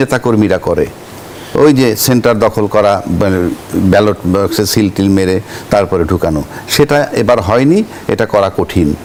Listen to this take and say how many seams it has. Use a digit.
0